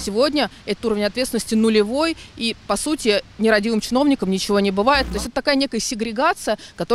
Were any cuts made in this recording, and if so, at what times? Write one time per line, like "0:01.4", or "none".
0:05.1